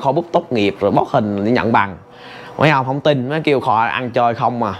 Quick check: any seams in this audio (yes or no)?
no